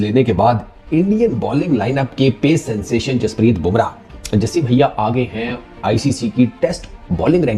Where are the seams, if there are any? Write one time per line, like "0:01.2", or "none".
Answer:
none